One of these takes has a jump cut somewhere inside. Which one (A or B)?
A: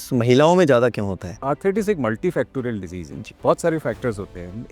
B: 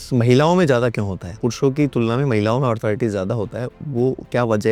A